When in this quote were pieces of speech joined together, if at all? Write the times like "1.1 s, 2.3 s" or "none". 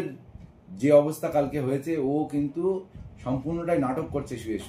none